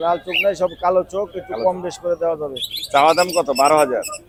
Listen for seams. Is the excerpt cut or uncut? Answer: uncut